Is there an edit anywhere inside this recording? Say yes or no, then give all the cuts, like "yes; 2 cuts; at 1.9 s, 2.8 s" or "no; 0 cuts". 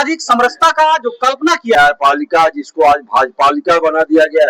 yes; 1 cut; at 1.7 s